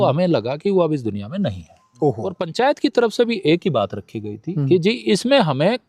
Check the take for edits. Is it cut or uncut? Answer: cut